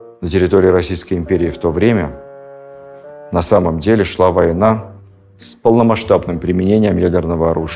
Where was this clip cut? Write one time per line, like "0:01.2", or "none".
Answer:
none